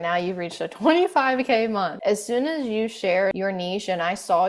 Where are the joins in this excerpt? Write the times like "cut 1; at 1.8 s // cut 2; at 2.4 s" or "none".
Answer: cut 1; at 1.9 s // cut 2; at 3.4 s